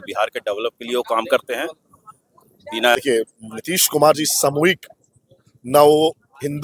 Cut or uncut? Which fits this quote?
cut